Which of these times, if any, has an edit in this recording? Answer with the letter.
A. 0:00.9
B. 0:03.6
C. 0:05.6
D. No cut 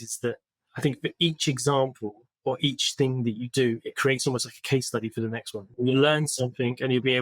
C